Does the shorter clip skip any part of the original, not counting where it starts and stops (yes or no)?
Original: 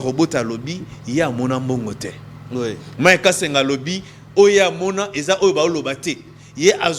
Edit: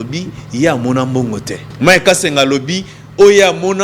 yes